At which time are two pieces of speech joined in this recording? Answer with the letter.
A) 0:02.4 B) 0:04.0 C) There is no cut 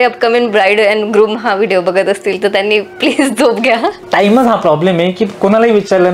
B